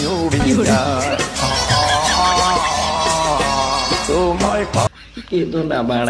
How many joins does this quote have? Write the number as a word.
one